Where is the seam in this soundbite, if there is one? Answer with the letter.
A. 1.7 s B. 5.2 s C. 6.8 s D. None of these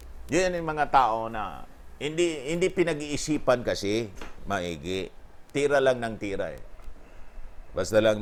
D